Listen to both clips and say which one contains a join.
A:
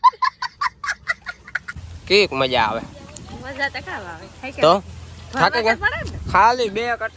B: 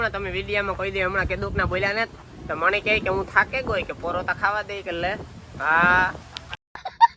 A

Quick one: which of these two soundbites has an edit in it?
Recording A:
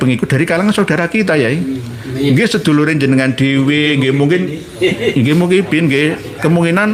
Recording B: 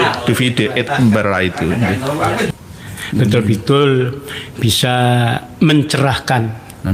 B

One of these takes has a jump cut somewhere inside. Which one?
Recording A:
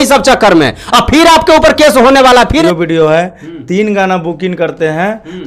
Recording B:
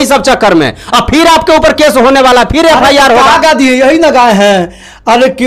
A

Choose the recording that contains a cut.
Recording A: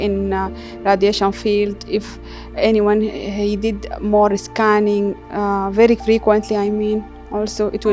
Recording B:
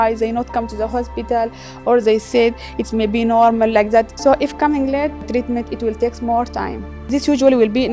B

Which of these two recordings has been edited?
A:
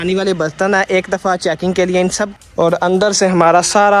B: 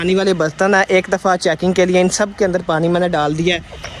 A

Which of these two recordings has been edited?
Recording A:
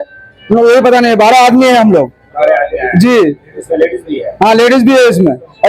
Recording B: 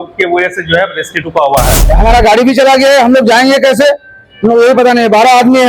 B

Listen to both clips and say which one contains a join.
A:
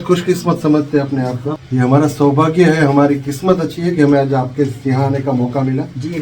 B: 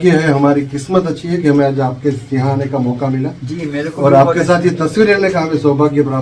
A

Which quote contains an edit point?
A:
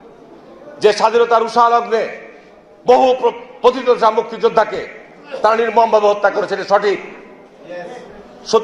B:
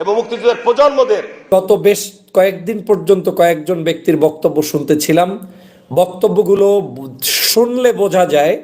B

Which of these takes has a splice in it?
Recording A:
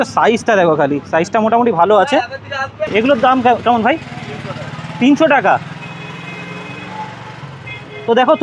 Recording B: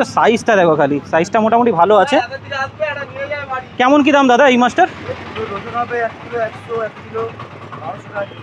A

